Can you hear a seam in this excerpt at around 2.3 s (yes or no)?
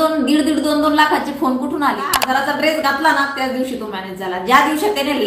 yes